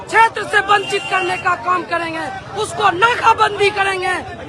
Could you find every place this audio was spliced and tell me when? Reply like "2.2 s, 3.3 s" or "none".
none